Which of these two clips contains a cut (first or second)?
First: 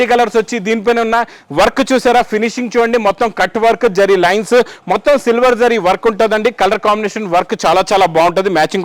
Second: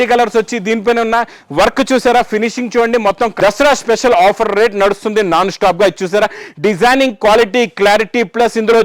second